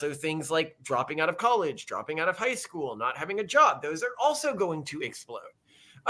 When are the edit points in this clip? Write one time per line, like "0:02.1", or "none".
none